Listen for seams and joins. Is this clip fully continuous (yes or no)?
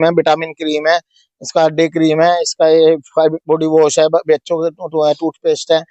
yes